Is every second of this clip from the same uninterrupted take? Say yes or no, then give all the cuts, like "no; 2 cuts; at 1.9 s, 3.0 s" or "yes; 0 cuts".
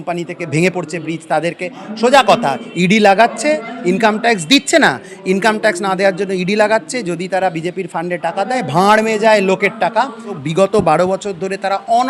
no; 1 cut; at 10.3 s